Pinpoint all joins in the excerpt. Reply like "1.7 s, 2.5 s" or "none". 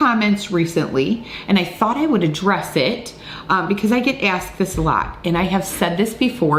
none